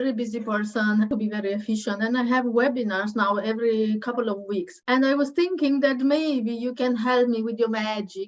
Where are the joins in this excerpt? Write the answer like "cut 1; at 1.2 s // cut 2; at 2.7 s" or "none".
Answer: cut 1; at 1.1 s // cut 2; at 4.7 s